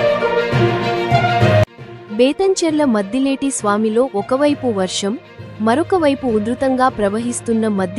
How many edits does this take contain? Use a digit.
1